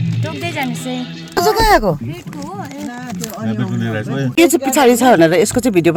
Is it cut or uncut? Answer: uncut